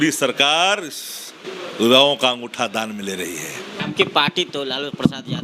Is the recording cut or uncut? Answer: cut